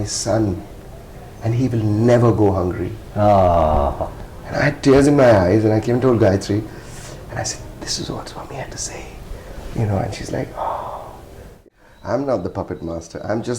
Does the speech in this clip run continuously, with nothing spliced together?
no; 1 cut; at 11.6 s

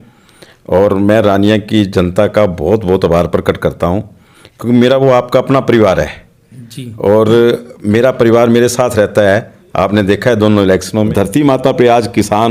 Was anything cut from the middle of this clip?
yes; 1 cut; at 11.1 s

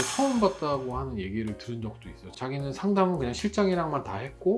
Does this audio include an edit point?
yes; 1 cut; at 2.3 s

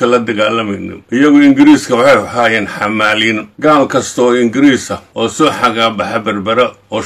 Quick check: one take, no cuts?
no; 3 cuts; at 1.2 s, 3.5 s, 5.3 s

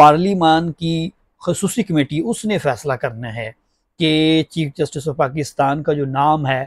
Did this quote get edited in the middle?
no; 0 cuts

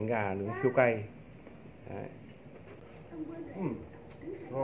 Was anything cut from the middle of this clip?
yes; 1 cut; at 2.8 s

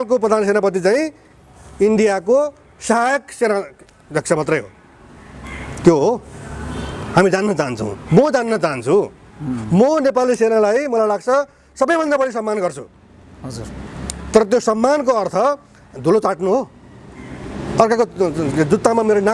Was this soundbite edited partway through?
no; 0 cuts

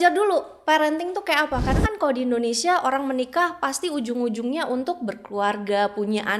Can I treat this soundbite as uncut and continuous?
yes; 0 cuts

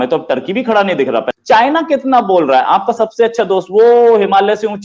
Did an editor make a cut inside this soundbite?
yes; 1 cut; at 1.3 s

